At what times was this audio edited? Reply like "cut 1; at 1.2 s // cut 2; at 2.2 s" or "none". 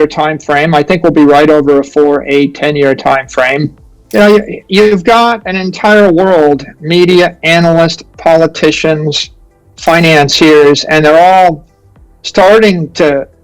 cut 1; at 3.9 s